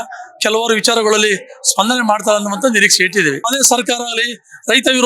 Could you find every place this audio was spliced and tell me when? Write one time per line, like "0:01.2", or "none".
0:03.5